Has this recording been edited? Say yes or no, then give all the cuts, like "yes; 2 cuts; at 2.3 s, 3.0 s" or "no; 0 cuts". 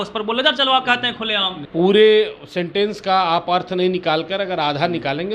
yes; 1 cut; at 1.6 s